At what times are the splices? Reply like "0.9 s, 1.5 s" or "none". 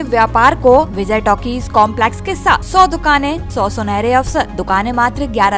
1.0 s, 2.6 s, 3.4 s, 4.6 s

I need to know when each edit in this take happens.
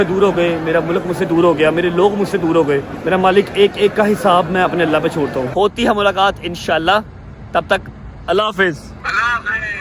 2.9 s, 5.5 s, 8.9 s

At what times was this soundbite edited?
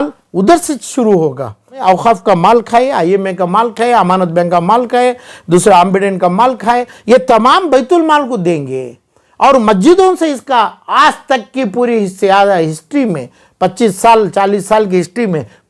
1.8 s

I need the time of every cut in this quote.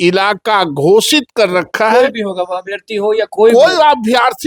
none

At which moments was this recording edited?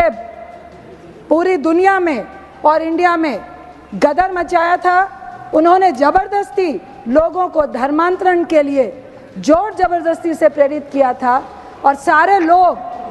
none

